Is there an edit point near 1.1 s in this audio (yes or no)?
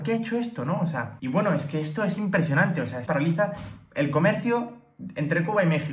yes